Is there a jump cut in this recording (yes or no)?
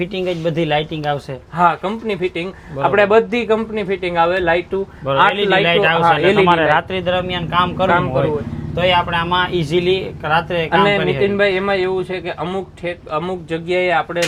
no